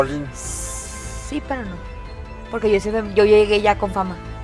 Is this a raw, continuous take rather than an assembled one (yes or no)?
yes